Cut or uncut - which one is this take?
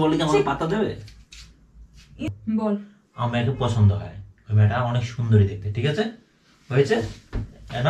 cut